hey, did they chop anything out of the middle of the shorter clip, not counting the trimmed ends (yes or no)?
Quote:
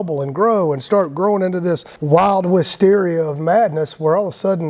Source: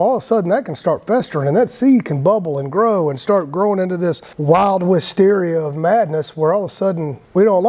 no